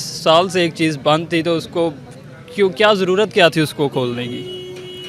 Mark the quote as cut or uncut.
uncut